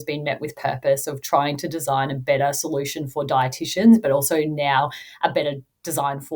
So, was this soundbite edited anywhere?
no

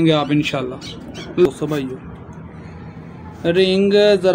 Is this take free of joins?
no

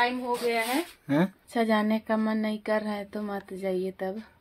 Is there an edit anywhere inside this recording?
yes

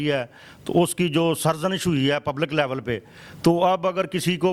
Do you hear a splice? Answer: no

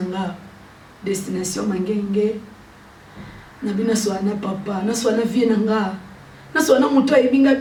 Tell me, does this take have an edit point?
no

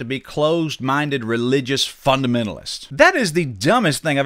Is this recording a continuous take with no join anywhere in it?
no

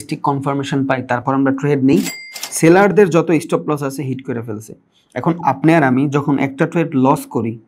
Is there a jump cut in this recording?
yes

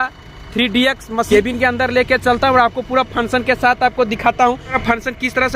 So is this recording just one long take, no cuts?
no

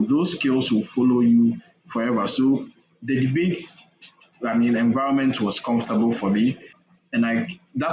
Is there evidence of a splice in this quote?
yes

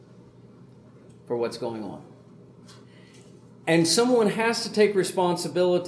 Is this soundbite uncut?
no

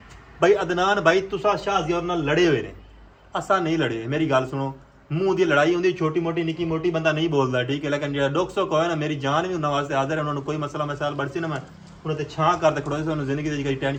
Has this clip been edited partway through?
no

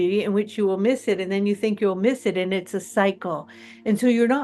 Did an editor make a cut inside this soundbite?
no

